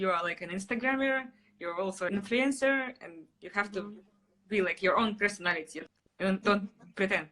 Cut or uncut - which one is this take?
cut